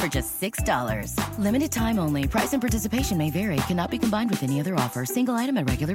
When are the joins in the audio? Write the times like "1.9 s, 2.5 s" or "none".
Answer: none